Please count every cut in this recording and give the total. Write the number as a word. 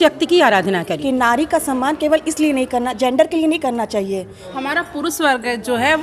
two